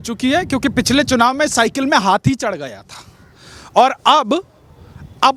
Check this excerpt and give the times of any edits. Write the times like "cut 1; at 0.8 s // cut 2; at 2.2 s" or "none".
none